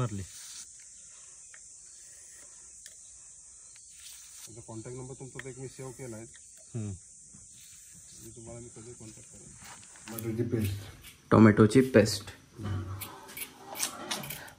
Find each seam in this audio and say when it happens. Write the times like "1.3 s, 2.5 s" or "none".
10.0 s